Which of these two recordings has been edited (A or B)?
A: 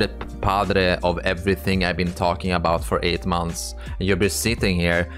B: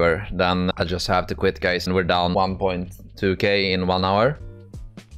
B